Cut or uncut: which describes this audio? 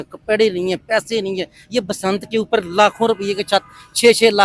uncut